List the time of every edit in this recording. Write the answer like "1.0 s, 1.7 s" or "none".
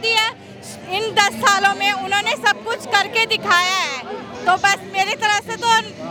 none